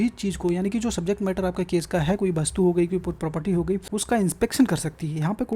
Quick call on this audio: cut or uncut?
cut